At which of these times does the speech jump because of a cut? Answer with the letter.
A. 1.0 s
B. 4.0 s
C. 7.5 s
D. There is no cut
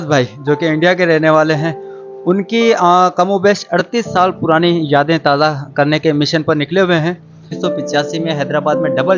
C